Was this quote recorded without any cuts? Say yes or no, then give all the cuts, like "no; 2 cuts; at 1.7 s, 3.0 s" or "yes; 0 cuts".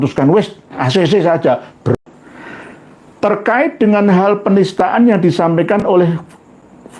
no; 1 cut; at 2.0 s